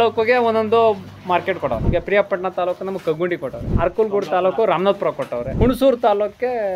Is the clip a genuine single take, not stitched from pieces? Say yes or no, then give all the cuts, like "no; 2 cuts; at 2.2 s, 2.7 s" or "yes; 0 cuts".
yes; 0 cuts